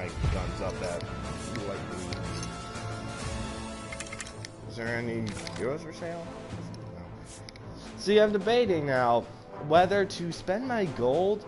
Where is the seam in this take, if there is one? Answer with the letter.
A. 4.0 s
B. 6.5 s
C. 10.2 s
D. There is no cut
A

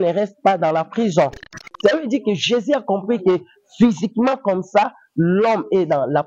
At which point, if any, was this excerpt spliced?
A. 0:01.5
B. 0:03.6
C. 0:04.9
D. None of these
A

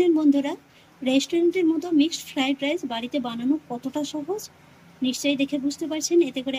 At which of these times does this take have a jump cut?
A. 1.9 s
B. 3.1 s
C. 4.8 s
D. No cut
D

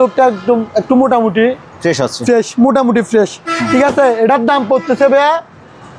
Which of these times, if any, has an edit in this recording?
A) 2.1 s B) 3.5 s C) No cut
C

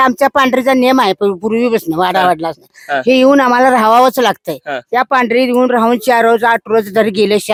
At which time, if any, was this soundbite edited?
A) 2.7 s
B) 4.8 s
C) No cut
C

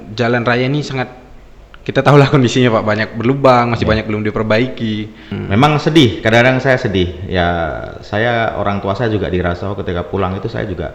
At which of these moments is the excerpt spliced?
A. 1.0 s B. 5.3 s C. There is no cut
B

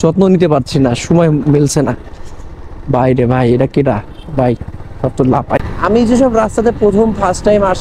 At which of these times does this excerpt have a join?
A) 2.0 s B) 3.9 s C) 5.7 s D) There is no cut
C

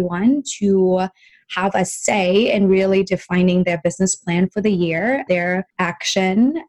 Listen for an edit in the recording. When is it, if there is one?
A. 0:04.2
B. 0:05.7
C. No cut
B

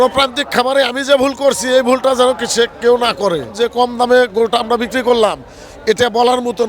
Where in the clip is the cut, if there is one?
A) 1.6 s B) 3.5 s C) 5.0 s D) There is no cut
B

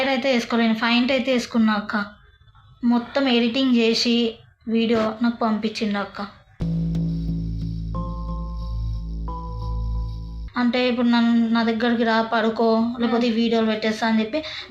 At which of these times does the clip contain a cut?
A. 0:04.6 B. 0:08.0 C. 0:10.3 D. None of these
C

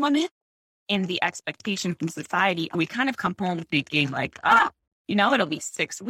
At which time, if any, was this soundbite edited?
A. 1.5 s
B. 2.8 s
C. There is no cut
B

